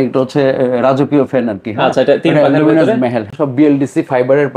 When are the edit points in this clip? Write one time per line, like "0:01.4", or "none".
0:03.4